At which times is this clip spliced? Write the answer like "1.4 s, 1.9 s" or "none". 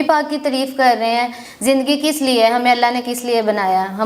1.5 s